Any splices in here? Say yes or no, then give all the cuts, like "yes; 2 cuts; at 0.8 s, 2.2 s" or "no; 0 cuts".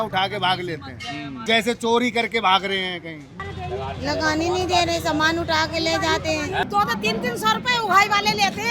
yes; 3 cuts; at 1.4 s, 3.4 s, 6.6 s